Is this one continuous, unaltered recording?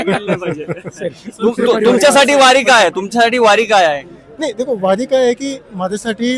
yes; 0 cuts

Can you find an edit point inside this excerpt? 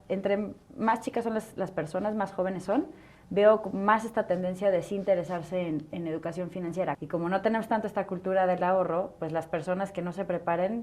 yes; 1 cut; at 7.0 s

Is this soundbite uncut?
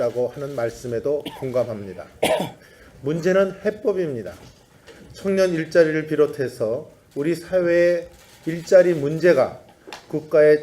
no; 1 cut; at 7.6 s

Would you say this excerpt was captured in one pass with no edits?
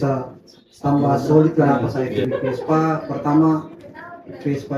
no; 1 cut; at 1.8 s

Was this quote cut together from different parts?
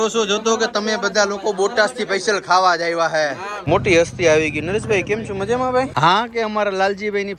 yes; 2 cuts; at 3.5 s, 5.9 s

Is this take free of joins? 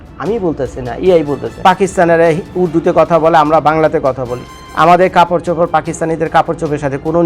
no; 1 cut; at 1.5 s

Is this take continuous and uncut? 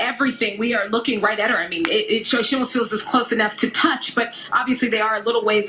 yes; 0 cuts

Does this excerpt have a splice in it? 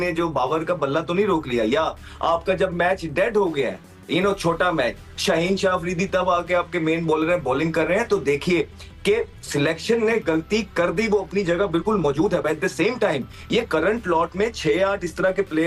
no; 0 cuts

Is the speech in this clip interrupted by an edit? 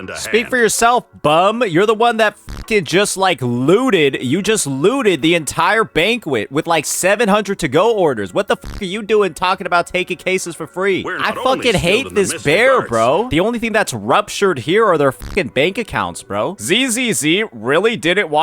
yes; 2 cuts; at 13.3 s, 16.6 s

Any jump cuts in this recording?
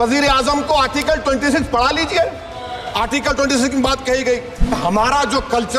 yes; 1 cut; at 4.7 s

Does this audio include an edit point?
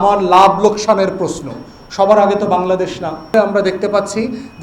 yes; 1 cut; at 3.3 s

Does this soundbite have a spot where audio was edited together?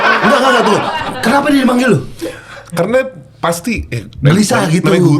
no; 0 cuts

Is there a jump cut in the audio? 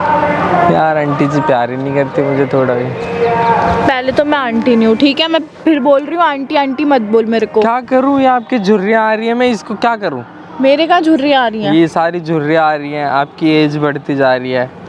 no; 0 cuts

